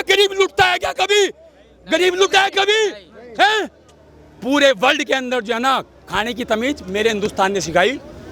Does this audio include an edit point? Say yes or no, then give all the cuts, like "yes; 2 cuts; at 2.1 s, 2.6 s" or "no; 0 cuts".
no; 0 cuts